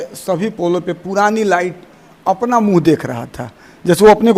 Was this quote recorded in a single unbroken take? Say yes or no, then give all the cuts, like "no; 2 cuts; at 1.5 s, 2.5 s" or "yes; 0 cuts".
yes; 0 cuts